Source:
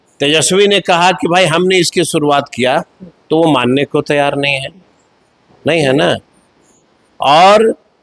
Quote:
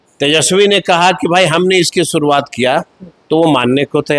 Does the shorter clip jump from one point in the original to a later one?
no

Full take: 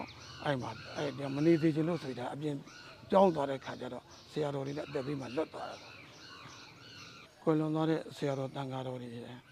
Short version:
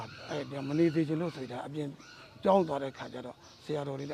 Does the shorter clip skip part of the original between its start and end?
no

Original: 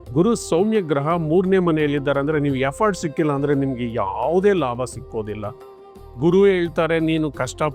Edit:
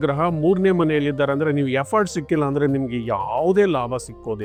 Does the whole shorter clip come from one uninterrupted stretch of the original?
yes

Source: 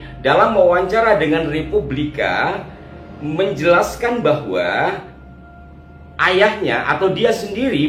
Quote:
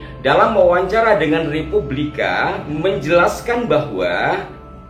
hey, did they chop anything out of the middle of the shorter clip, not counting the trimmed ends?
yes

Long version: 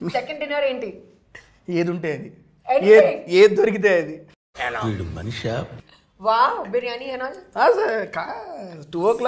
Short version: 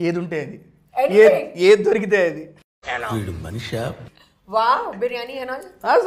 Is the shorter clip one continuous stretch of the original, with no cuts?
yes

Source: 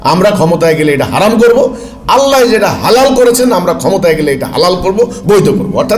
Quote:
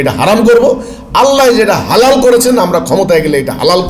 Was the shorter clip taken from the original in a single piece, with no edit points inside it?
yes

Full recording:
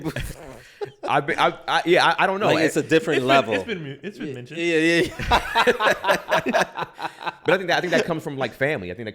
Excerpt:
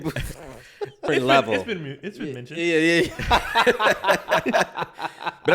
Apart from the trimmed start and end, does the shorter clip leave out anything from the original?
yes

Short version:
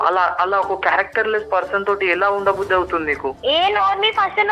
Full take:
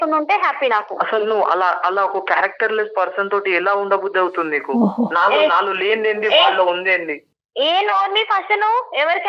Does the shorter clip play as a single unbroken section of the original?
no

